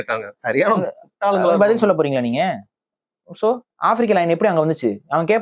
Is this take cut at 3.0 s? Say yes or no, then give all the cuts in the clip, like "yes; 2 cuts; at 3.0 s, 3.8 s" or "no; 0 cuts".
no; 0 cuts